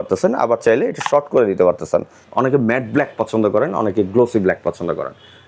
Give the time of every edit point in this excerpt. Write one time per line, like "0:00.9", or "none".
0:02.2